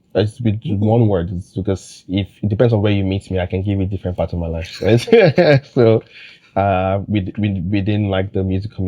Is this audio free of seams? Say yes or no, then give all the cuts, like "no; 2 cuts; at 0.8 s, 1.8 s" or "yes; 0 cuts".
yes; 0 cuts